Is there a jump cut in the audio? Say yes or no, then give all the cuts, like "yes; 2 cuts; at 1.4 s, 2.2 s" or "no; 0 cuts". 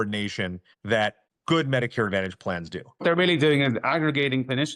yes; 1 cut; at 2.9 s